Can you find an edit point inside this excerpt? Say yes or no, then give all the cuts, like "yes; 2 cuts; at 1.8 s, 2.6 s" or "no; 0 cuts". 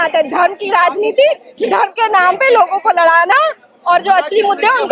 no; 0 cuts